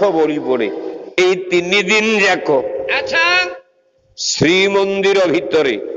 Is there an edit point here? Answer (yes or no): yes